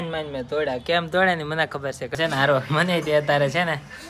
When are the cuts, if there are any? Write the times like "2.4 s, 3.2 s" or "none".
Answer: 2.1 s